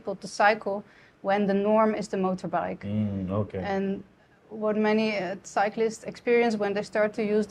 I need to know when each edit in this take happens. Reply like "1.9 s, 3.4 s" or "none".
none